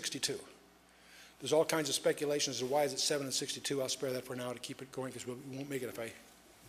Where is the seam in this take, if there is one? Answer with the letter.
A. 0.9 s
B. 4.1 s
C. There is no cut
B